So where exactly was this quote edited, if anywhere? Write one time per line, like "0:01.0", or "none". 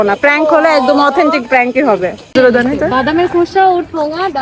0:02.3